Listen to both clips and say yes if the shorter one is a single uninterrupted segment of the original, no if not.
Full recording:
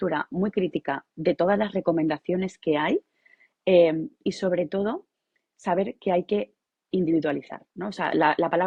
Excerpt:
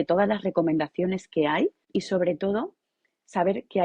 no